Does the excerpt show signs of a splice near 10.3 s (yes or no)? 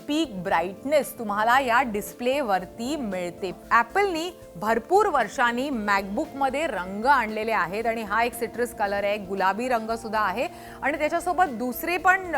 no